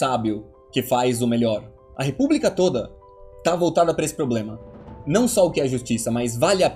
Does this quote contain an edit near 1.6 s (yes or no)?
no